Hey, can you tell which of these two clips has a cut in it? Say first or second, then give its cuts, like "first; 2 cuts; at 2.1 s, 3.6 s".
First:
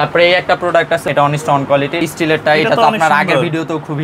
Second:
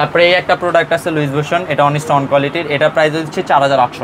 first; 2 cuts; at 1.0 s, 2.0 s